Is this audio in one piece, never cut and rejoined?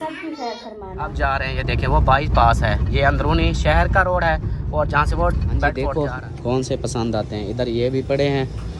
no; 2 cuts; at 1.1 s, 5.8 s

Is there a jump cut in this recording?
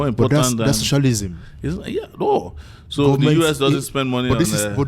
no; 0 cuts

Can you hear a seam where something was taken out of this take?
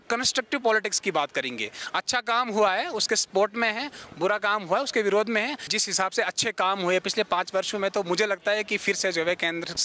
yes; 1 cut; at 5.7 s

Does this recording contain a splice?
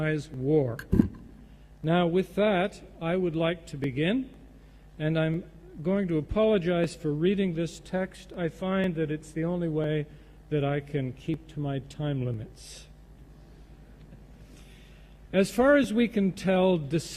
yes; 1 cut; at 4.5 s

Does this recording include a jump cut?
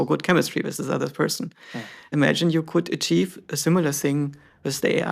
yes; 1 cut; at 2.1 s

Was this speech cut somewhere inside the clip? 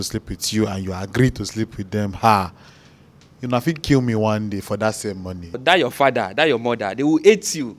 yes; 1 cut; at 5.6 s

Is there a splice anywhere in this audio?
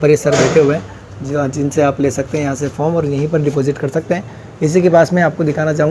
no; 0 cuts

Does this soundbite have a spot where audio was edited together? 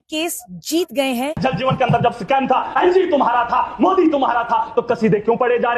yes; 1 cut; at 1.4 s

